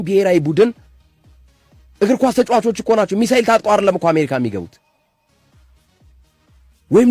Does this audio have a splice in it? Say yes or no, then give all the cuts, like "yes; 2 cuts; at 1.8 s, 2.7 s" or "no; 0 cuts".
no; 0 cuts